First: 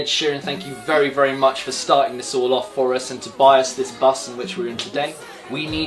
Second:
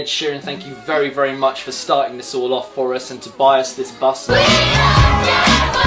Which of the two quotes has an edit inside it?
second; 1 cut; at 4.2 s

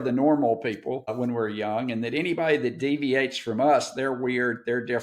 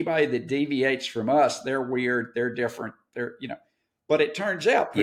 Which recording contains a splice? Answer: first; 1 cut; at 1.1 s

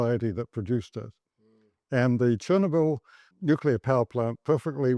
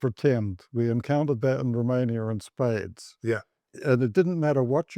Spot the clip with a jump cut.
first; 1 cut; at 3.3 s

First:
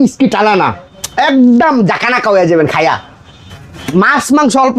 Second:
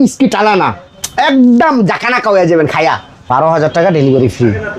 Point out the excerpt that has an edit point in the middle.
second; 1 cut; at 3.2 s

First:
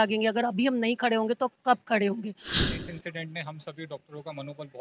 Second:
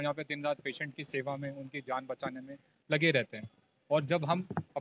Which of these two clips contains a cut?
first; 1 cut; at 2.5 s

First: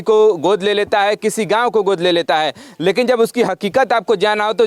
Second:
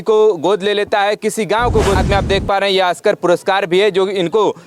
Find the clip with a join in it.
second; 1 cut; at 2.0 s

